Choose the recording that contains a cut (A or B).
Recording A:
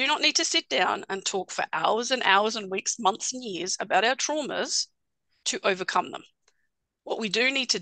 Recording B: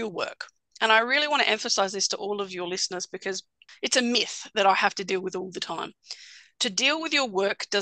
B